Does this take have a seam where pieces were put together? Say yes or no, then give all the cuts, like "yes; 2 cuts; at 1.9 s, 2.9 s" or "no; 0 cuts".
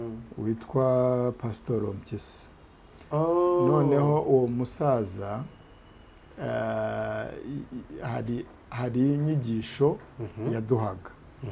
no; 0 cuts